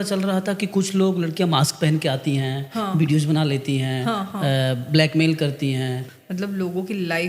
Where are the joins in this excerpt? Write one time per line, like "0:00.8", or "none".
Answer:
0:06.0